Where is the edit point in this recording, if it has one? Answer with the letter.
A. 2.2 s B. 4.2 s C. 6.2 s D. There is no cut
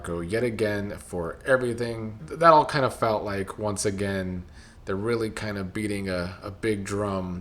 A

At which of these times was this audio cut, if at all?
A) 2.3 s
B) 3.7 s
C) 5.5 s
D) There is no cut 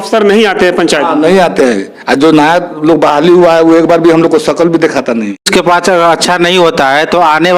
C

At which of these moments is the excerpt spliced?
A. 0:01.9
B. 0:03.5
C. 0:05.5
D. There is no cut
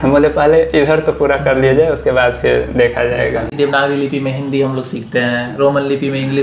B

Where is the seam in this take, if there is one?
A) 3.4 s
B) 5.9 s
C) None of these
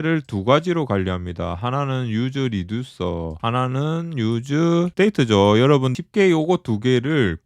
B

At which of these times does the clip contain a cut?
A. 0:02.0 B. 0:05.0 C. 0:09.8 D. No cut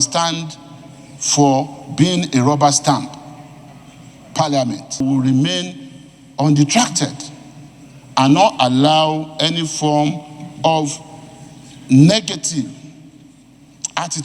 B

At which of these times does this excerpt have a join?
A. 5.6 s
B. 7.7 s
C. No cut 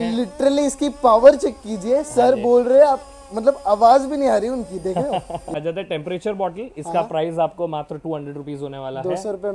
A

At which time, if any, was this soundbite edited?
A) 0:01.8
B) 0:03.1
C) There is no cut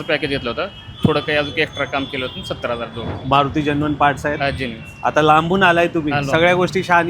B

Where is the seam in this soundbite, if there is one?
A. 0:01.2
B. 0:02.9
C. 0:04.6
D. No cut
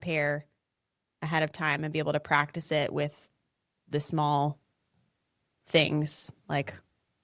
D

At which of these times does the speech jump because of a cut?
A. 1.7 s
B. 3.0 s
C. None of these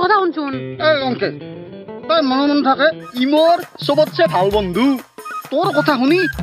B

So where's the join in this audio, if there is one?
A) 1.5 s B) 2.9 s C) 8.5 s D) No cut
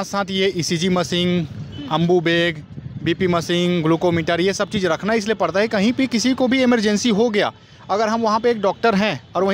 D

